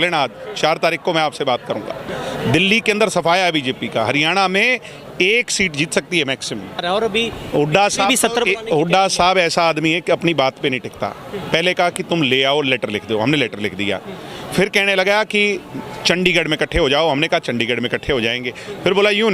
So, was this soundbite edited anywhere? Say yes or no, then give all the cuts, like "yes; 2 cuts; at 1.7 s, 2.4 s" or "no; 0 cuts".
yes; 1 cut; at 6.8 s